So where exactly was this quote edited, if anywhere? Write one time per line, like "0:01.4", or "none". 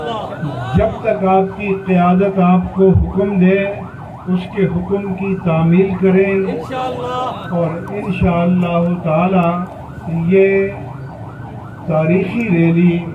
none